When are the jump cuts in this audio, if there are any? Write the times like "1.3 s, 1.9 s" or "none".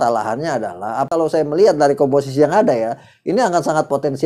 1.1 s